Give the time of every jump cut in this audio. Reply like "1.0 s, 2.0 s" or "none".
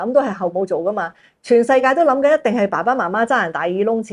none